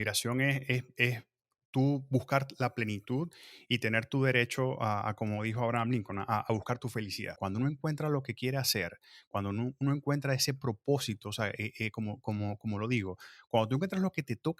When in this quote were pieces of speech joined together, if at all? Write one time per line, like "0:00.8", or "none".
0:07.4